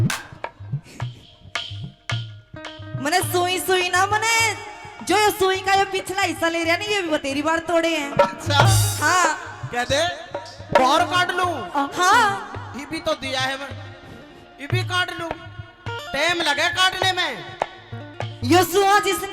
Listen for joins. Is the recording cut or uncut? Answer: cut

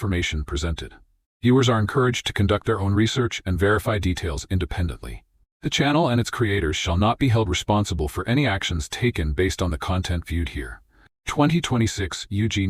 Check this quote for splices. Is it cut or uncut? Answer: uncut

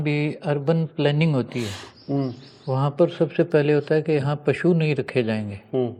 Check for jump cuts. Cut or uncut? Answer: uncut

